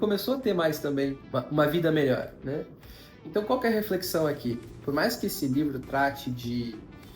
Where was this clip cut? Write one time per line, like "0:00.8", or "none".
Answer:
0:01.2

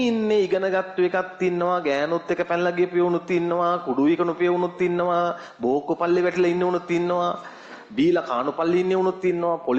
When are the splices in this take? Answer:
none

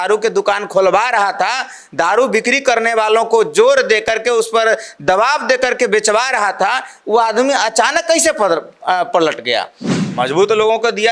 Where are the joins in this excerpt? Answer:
0:09.8

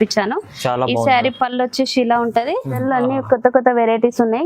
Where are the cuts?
0:02.8

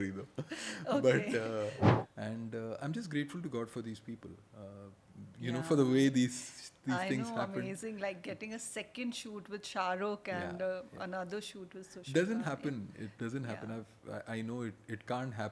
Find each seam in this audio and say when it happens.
0:02.0

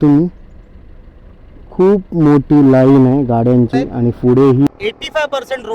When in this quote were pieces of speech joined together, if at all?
0:04.7

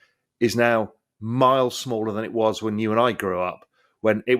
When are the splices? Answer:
none

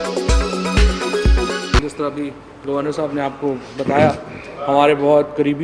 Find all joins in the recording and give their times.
0:01.7

